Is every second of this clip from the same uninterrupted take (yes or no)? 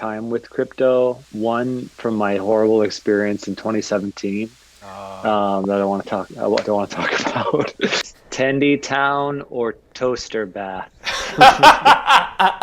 no